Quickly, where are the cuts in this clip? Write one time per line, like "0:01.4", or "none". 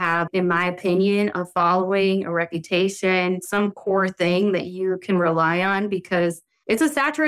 0:03.4

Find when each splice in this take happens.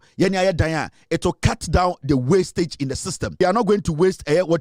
0:03.4

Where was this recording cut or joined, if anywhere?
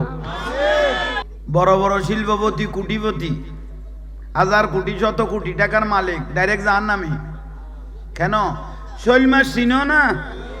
0:01.3

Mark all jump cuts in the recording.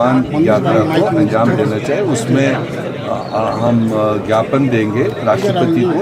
none

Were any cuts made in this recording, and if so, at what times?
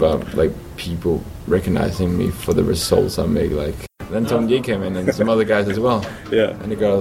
0:03.9

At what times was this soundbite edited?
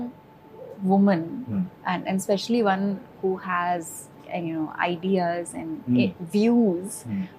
none

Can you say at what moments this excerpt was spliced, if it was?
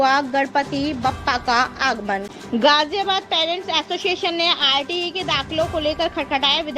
0:02.3

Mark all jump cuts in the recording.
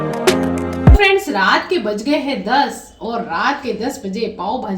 0:00.9

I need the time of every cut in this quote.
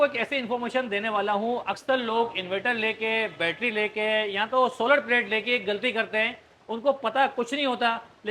none

